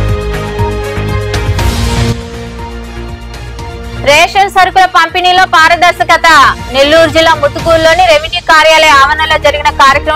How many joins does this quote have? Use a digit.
1